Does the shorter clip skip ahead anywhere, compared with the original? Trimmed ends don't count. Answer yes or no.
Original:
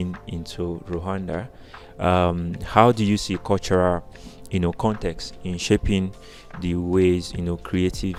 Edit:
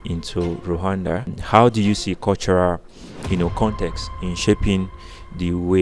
yes